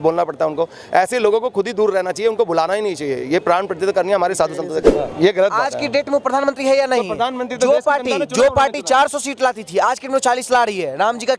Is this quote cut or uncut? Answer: cut